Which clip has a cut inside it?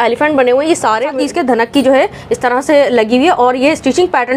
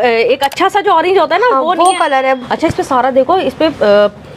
first; 1 cut; at 1.1 s

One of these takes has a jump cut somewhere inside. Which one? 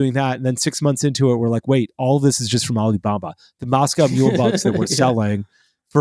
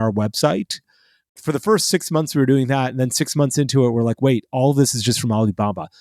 second; 1 cut; at 1.2 s

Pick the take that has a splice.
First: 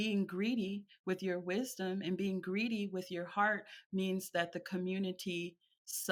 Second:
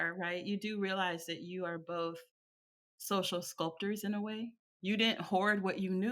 second; 1 cut; at 4.6 s

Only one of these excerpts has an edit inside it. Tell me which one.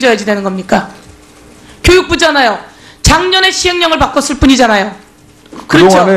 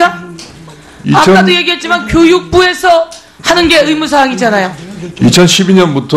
second; 1 cut; at 4.8 s

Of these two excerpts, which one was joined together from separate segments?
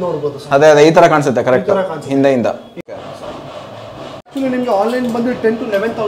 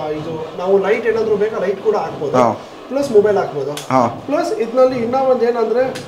first; 2 cuts; at 2.9 s, 4.3 s

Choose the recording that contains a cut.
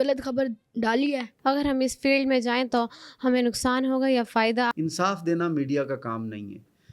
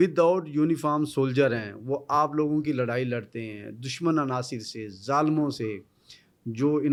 first; 2 cuts; at 1.3 s, 4.7 s

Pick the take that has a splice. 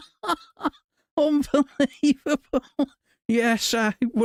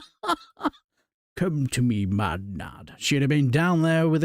second; 1 cut; at 0.9 s

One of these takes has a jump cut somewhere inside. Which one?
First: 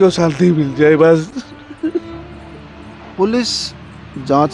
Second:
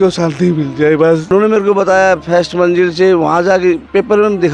second; 1 cut; at 1.3 s

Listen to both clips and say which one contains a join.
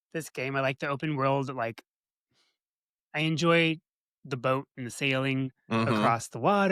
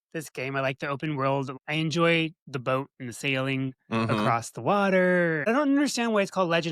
second; 3 cuts; at 1.5 s, 2.5 s, 5.5 s

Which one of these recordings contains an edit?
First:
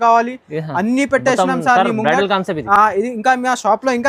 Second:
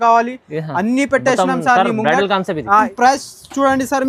second; 1 cut; at 2.8 s

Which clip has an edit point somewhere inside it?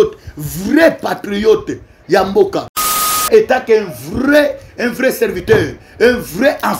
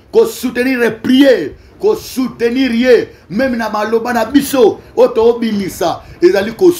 first; 1 cut; at 2.8 s

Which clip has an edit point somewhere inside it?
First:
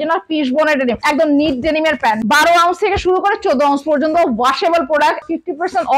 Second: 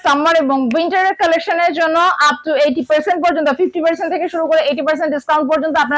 first; 3 cuts; at 1.0 s, 2.2 s, 5.2 s

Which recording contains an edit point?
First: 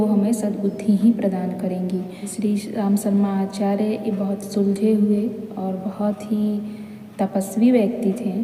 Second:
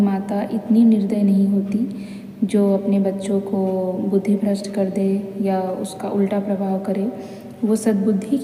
first; 1 cut; at 2.3 s

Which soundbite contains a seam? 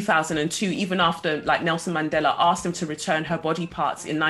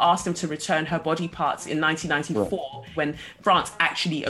second; 1 cut; at 2.9 s

